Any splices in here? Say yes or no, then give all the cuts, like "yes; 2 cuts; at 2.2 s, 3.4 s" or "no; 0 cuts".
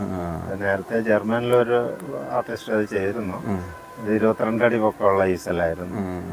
no; 0 cuts